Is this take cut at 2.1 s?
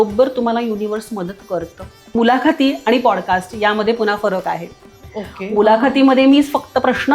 yes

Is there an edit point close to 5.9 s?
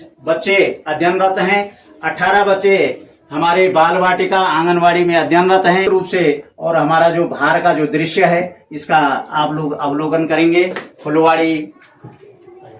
yes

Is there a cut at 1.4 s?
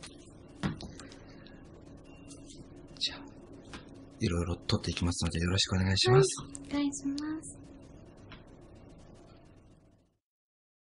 yes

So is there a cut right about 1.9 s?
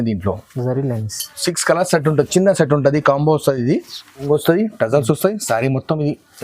no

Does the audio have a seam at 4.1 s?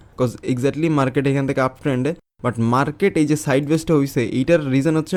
no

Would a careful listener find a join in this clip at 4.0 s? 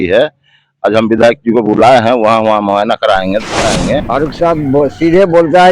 yes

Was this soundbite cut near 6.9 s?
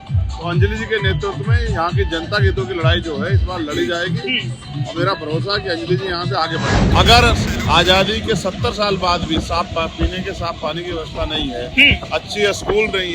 yes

